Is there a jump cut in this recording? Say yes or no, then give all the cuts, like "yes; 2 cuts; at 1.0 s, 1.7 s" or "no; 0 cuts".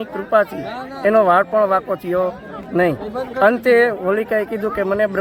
no; 0 cuts